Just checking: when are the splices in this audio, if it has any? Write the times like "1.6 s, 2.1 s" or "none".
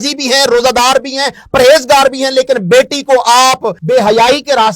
3.7 s